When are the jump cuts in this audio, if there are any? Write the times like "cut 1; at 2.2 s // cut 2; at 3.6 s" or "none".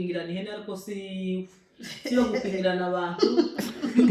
none